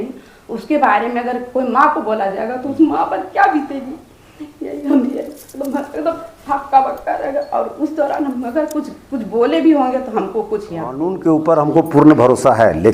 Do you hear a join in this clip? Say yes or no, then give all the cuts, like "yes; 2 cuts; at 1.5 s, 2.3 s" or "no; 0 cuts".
yes; 1 cut; at 11.2 s